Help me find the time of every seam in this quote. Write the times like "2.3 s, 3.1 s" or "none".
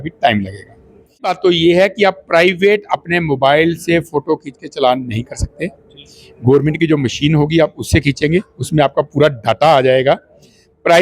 1.3 s